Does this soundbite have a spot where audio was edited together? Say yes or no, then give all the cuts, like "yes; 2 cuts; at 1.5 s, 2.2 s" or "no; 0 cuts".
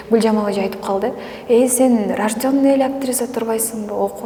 no; 0 cuts